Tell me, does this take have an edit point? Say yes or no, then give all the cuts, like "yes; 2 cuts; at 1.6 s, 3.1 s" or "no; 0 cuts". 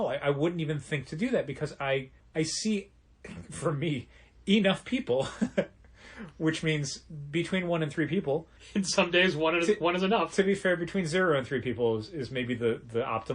yes; 2 cuts; at 2.2 s, 8.6 s